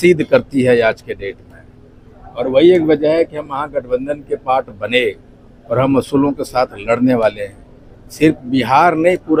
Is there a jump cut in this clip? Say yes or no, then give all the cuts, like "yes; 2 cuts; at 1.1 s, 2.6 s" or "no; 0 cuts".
no; 0 cuts